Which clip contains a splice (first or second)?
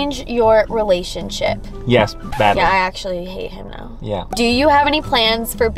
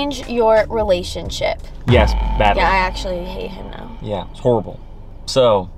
first